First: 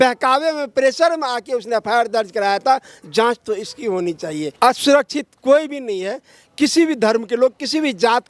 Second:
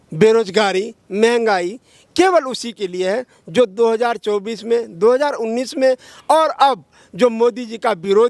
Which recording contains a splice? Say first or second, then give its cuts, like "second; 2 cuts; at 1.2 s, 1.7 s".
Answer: first; 1 cut; at 4.4 s